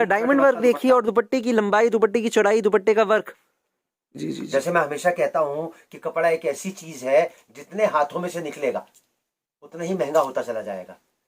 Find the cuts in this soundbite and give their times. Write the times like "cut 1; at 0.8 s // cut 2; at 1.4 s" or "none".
cut 1; at 4.2 s